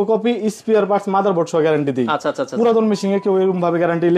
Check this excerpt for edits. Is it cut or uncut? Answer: uncut